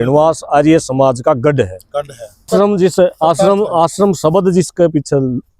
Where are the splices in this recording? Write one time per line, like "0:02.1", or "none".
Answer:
0:02.5